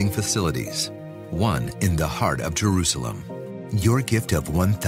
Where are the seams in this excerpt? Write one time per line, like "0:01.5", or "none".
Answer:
0:03.9